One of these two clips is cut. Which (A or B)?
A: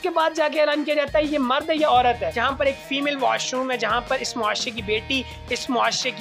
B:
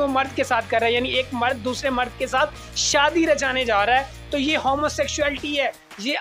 A